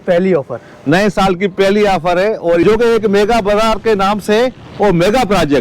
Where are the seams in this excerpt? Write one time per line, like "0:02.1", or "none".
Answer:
0:02.6